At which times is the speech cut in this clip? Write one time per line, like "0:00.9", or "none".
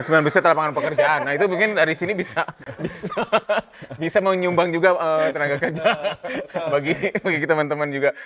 none